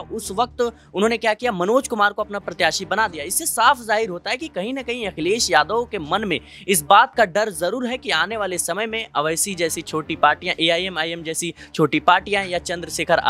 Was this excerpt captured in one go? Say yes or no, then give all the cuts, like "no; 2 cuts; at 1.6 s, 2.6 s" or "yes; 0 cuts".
yes; 0 cuts